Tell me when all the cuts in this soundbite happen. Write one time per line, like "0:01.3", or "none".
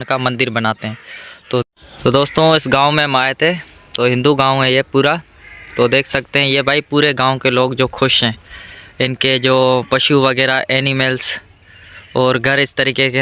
0:01.7